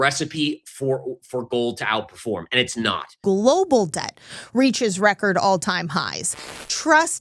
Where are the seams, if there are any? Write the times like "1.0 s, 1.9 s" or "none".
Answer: 3.1 s